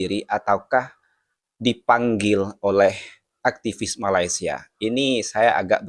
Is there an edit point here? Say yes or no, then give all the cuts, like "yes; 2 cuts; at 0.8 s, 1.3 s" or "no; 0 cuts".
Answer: no; 0 cuts